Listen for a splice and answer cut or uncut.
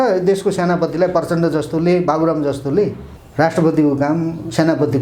cut